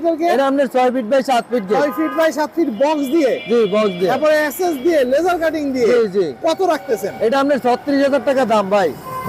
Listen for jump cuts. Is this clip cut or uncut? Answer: uncut